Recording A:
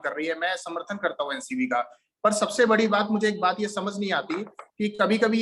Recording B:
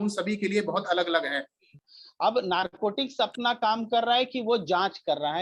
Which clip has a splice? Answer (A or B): B